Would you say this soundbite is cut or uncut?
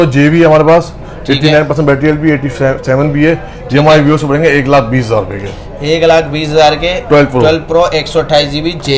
uncut